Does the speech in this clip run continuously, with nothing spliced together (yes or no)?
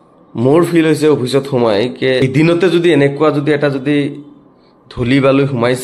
no